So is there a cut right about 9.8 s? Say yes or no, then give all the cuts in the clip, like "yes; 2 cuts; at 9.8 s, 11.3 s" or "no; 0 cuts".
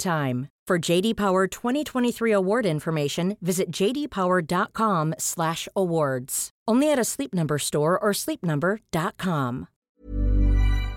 yes; 1 cut; at 9.8 s